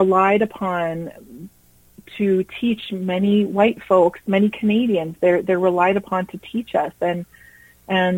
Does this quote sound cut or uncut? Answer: uncut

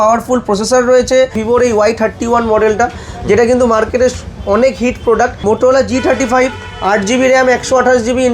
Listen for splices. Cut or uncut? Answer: cut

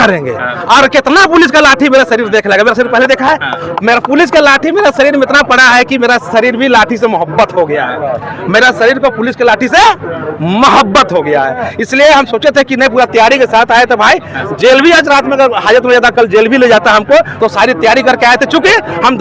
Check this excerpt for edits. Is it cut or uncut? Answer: uncut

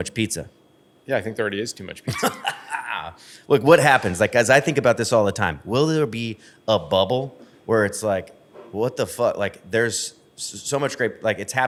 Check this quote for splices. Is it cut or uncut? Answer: uncut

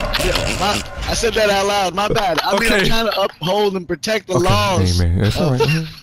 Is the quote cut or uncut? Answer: uncut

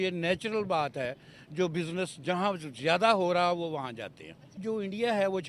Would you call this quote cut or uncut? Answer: cut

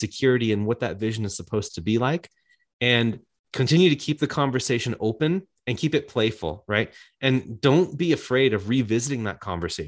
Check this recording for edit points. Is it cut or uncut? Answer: cut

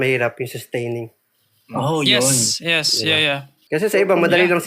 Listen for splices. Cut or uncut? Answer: cut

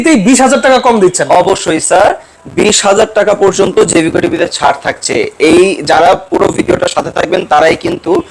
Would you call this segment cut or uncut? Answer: uncut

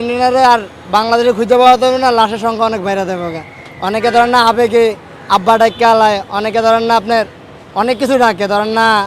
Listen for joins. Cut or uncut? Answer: uncut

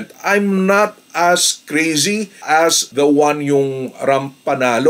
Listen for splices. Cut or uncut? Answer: uncut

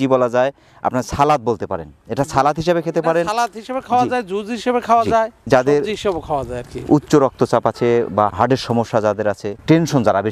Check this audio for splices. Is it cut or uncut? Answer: uncut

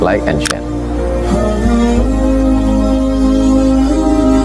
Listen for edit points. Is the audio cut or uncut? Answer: uncut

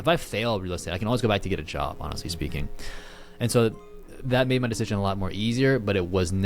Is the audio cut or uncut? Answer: uncut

